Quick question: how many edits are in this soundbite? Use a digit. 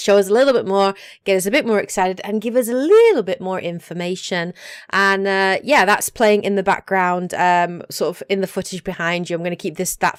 0